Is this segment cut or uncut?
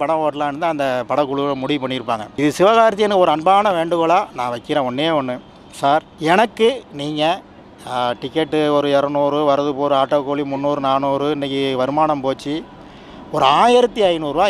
uncut